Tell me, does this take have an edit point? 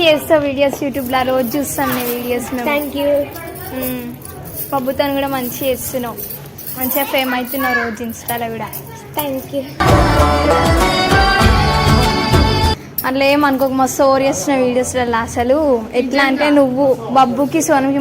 no; 0 cuts

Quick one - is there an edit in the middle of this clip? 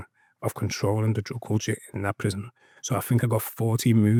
no; 0 cuts

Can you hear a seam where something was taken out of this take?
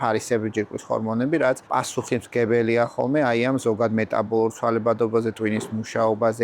yes; 1 cut; at 1.6 s

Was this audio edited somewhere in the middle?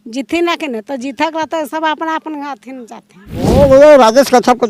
yes; 1 cut; at 3.5 s

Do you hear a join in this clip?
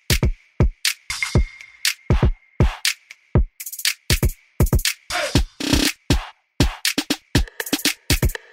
no; 0 cuts

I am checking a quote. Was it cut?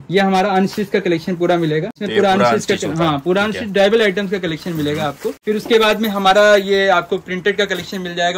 yes; 2 cuts; at 2.0 s, 5.4 s

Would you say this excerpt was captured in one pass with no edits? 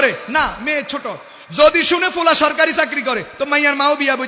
yes; 0 cuts

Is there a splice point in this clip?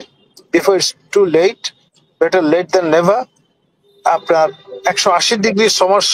no; 0 cuts

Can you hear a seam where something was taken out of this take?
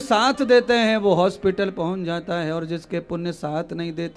no; 0 cuts

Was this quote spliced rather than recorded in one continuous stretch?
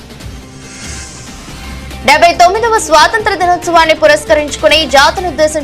yes; 1 cut; at 2.0 s

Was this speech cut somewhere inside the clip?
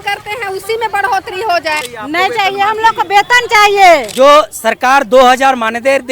yes; 2 cuts; at 1.9 s, 4.1 s

